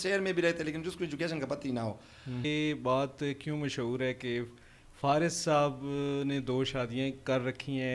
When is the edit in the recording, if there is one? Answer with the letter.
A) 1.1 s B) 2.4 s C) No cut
B